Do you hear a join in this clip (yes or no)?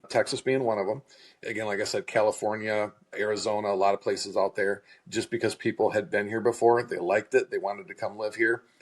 yes